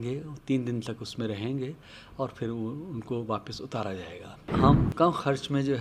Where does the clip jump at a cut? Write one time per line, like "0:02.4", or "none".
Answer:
0:04.5